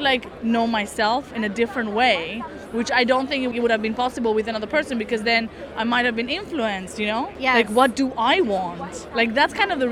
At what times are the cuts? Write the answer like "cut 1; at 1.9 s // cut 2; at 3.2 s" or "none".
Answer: cut 1; at 3.5 s // cut 2; at 7.3 s